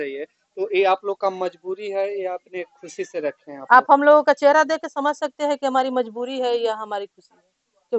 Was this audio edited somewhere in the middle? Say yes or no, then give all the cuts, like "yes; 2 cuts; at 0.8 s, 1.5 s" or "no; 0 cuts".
no; 0 cuts